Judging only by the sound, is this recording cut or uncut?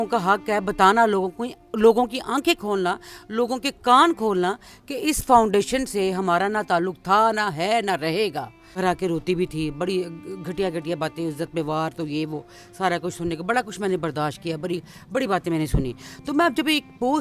cut